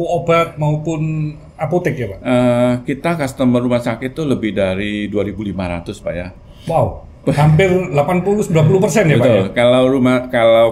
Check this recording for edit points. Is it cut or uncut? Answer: uncut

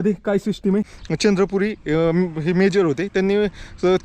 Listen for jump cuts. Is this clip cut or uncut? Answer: cut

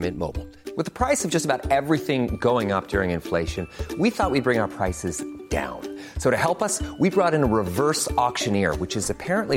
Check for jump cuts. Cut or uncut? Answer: uncut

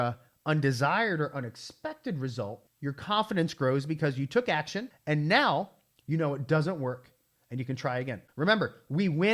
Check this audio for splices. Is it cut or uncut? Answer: cut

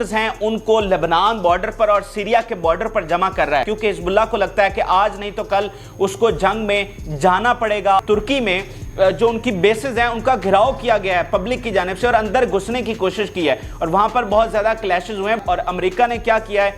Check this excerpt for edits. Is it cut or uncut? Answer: cut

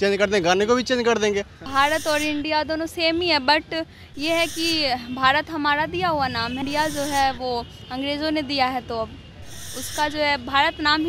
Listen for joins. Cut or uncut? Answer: cut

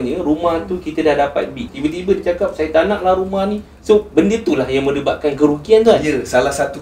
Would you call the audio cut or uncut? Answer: cut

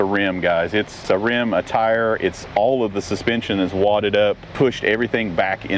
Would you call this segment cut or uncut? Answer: cut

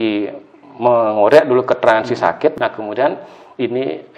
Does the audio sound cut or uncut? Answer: cut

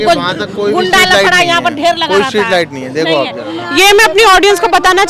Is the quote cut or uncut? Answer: uncut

